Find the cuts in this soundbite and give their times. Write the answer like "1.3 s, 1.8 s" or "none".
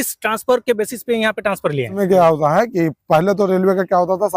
2.0 s